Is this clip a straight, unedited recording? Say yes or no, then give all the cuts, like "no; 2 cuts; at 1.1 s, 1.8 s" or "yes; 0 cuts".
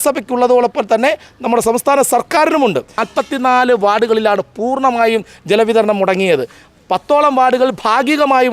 no; 1 cut; at 3.0 s